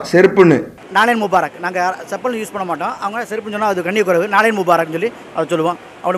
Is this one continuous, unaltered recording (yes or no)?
yes